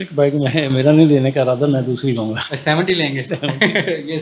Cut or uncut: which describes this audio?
uncut